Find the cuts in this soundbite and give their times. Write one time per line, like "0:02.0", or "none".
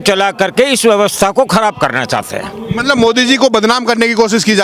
none